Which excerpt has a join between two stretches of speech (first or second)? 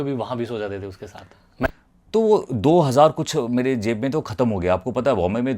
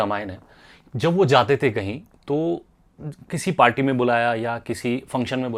first